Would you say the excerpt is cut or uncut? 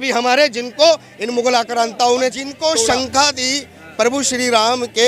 cut